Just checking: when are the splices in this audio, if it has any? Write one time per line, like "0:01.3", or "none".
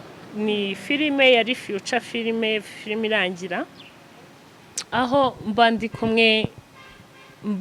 none

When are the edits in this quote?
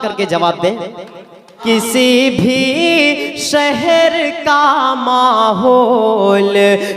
0:01.5

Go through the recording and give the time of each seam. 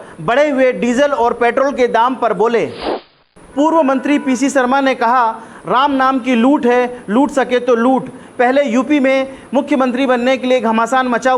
0:02.9

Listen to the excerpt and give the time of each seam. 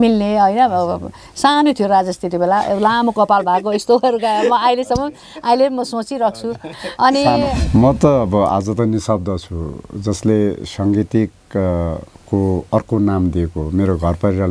0:07.6

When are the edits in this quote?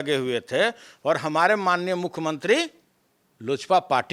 none

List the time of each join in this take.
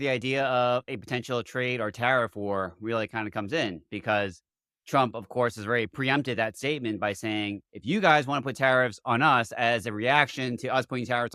none

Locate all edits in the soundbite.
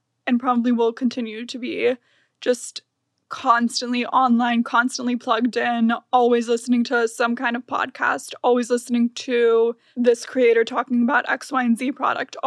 0:09.8

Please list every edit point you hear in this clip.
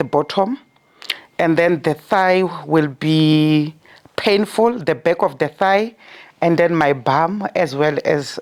none

